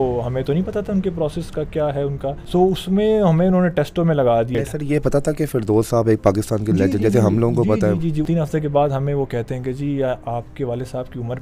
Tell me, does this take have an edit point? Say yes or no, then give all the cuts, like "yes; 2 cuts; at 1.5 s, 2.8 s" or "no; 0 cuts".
yes; 3 cuts; at 2.4 s, 4.5 s, 8.3 s